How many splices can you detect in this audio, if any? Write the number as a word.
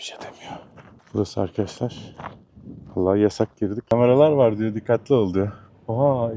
two